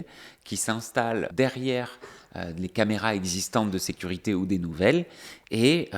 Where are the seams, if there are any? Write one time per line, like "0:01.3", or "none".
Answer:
0:01.3